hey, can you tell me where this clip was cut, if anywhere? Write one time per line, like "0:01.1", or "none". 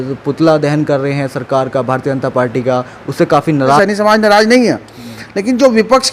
0:03.8